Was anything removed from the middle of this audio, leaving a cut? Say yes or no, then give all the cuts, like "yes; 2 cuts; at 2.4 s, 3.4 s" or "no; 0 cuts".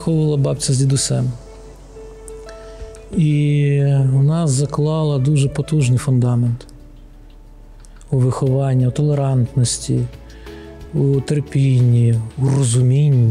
no; 0 cuts